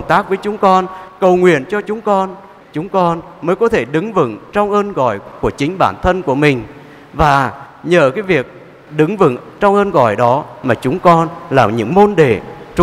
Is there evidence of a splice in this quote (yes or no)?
no